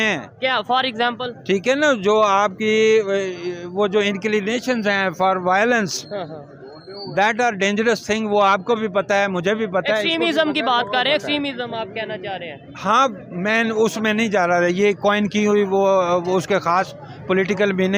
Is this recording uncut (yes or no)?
yes